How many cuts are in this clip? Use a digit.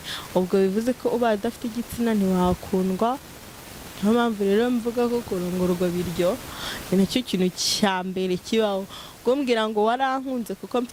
0